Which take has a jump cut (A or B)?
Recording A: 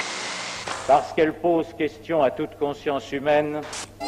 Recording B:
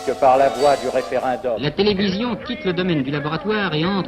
B